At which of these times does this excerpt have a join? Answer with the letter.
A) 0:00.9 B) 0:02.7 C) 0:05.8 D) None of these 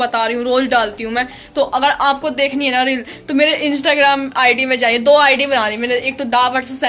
D